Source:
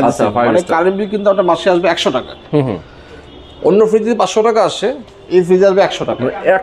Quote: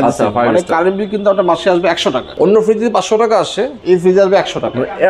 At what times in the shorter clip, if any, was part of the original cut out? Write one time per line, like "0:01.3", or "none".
0:02.3
0:03.7

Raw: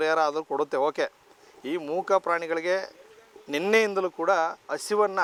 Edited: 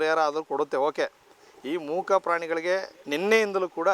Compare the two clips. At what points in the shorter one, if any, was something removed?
0:03.0

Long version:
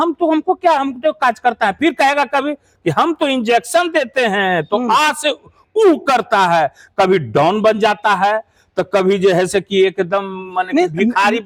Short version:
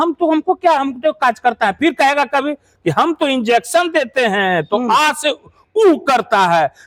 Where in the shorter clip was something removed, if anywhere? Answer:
none

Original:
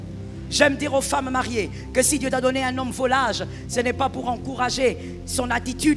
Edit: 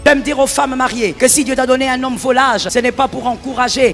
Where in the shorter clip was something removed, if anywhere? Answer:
0:01.1
0:02.7

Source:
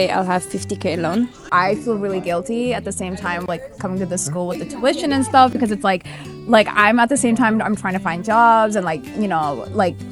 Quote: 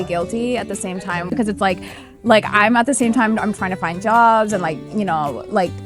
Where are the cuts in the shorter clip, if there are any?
0:01.3

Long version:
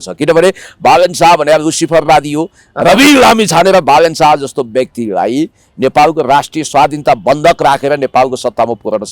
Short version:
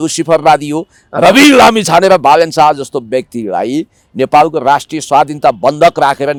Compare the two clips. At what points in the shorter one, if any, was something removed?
none

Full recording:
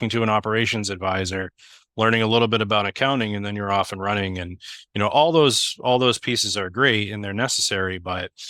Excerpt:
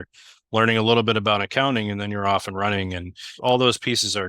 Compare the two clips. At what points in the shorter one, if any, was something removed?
0:03.3

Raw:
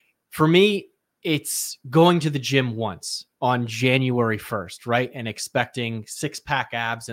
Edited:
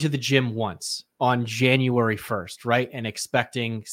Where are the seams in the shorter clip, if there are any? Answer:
none

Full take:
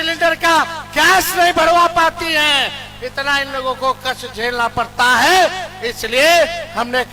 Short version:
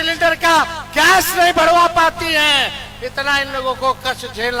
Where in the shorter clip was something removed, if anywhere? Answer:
none

